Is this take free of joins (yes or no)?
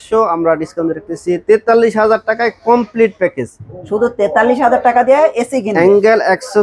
yes